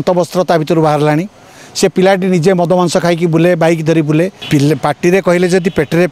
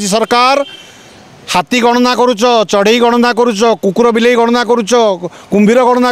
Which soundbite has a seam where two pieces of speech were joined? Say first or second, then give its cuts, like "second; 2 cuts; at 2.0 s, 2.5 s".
first; 1 cut; at 4.4 s